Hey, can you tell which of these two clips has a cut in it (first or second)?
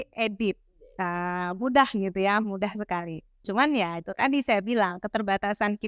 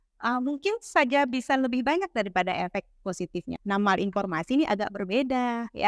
second